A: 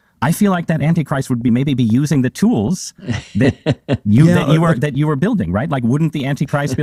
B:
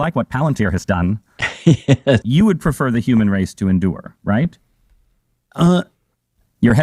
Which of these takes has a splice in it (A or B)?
B